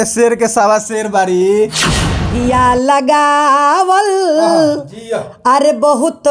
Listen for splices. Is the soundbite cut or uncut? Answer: cut